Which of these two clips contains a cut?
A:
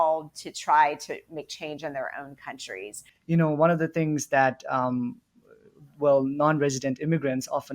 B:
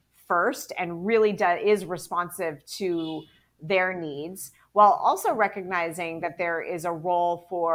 A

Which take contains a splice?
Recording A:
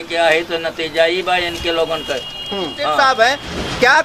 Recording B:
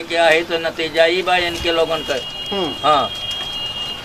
A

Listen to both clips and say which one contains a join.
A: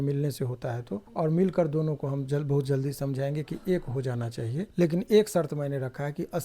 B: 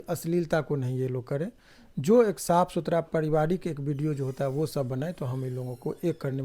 A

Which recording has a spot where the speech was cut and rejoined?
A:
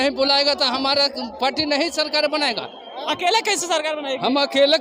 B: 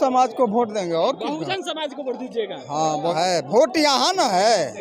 B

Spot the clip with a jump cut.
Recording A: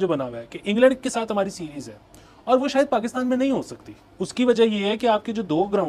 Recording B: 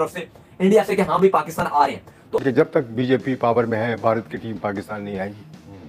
B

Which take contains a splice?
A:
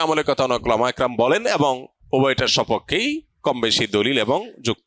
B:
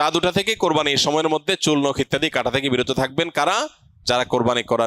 A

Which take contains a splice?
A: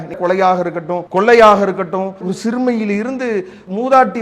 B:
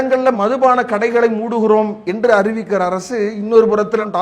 A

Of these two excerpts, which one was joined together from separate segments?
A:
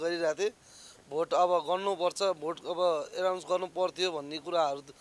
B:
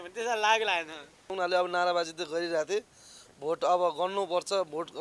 B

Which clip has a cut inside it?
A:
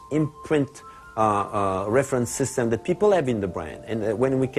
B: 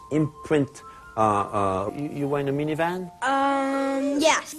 A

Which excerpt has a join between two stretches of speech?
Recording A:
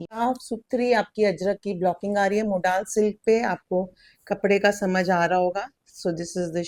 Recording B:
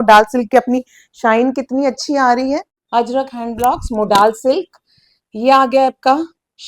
B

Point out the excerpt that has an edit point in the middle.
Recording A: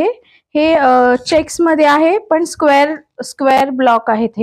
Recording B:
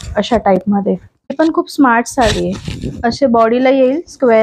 B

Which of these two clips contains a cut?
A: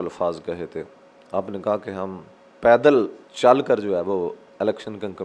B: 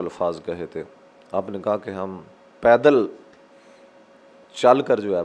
A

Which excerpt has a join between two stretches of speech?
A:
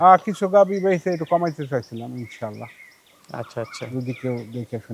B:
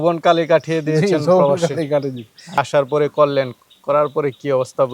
B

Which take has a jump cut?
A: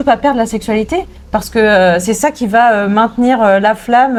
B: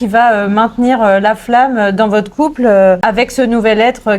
B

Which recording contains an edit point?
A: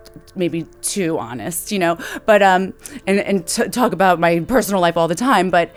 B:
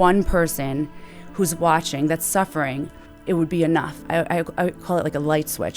B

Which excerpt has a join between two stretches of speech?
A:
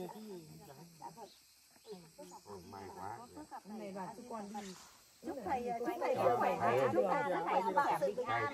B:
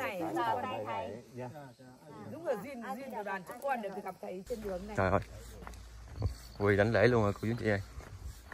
B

